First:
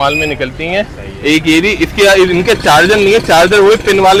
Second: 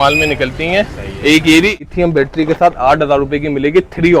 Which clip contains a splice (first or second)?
second